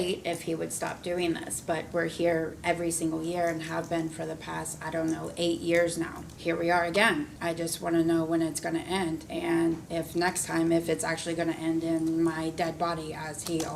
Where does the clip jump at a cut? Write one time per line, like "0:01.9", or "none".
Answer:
0:06.2
0:07.3
0:09.3
0:09.8